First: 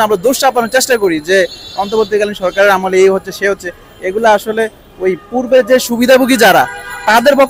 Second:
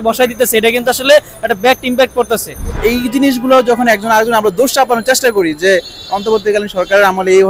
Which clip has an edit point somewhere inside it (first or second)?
second